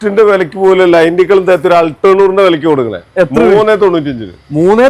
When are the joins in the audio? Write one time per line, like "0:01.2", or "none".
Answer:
none